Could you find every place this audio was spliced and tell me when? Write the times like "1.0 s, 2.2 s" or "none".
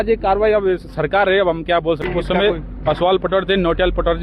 2.0 s